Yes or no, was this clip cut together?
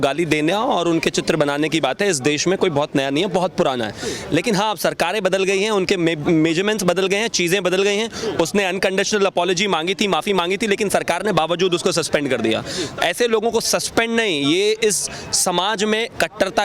no